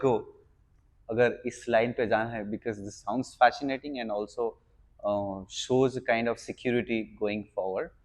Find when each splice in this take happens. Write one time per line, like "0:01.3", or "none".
none